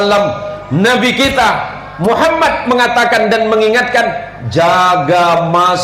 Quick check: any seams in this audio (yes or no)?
no